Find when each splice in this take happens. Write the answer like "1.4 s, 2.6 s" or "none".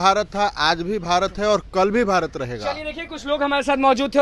none